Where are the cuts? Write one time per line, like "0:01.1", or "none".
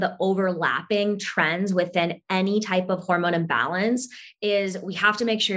none